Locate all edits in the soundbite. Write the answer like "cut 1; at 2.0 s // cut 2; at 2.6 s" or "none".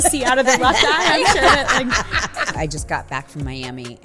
cut 1; at 2.5 s